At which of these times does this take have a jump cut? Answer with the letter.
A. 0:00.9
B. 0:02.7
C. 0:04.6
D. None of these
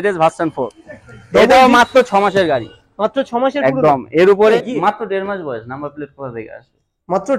C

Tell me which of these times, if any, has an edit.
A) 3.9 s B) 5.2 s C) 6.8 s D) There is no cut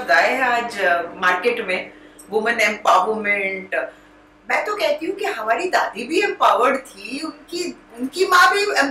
D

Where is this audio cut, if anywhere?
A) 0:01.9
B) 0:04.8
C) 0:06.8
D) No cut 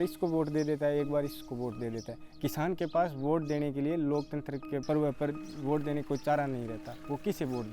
B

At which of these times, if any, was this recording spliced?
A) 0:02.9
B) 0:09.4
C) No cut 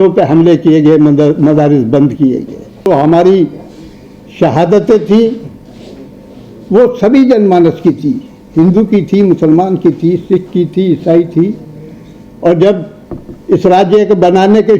A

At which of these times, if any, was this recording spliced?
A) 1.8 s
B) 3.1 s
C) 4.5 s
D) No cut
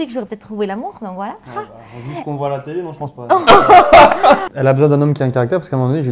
C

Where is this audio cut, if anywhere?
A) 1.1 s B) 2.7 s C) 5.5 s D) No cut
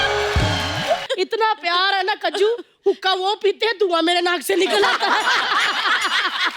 A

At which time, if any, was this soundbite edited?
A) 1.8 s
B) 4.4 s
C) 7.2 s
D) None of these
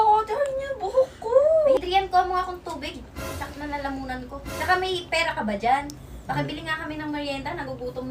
A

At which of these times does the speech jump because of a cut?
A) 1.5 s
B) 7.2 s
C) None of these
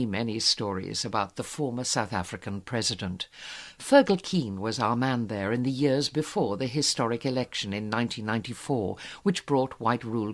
B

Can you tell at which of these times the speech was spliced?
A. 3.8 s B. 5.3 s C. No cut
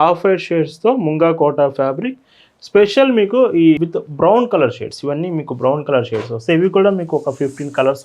A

